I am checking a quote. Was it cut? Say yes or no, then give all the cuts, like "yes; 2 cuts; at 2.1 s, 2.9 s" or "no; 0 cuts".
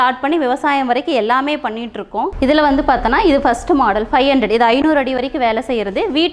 yes; 1 cut; at 2.3 s